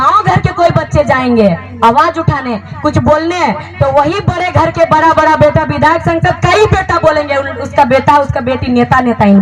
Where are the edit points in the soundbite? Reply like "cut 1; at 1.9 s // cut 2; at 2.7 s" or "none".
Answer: none